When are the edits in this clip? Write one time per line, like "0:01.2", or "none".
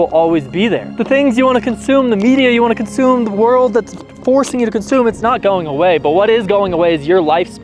0:00.9